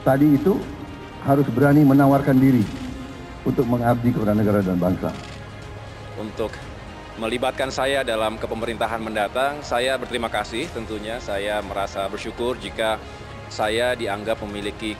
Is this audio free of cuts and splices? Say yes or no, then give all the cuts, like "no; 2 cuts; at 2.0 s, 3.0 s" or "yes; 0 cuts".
yes; 0 cuts